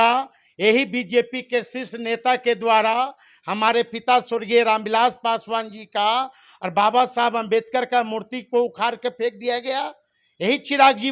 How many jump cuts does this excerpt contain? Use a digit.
0